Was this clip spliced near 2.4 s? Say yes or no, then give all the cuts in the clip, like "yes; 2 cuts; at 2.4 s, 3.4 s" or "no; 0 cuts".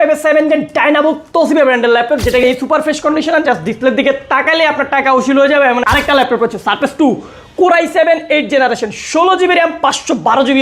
yes; 2 cuts; at 2.4 s, 5.8 s